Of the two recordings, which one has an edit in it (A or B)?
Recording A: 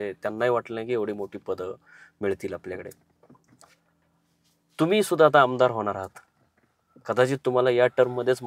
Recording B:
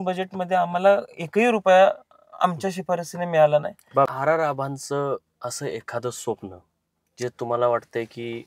B